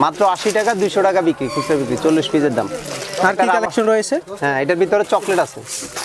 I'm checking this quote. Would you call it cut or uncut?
uncut